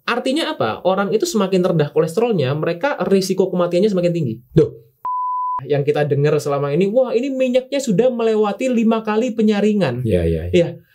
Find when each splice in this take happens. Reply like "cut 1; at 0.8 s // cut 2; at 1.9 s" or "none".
cut 1; at 5.3 s